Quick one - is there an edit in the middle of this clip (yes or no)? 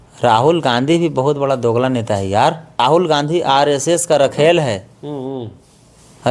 yes